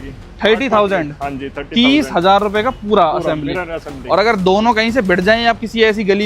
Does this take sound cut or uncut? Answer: uncut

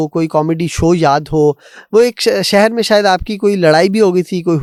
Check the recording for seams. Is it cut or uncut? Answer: uncut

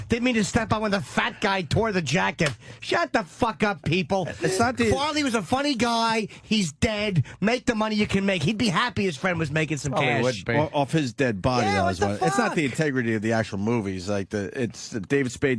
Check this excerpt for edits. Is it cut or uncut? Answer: cut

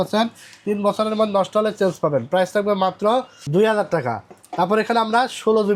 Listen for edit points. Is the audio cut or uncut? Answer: uncut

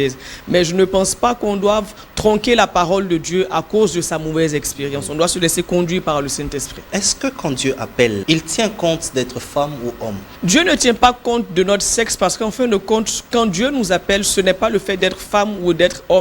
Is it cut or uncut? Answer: cut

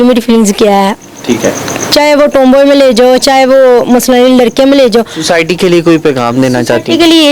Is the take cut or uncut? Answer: uncut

